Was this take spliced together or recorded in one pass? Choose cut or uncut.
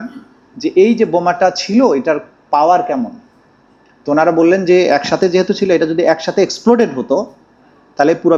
uncut